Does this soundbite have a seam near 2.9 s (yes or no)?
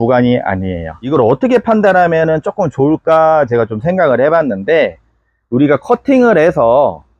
no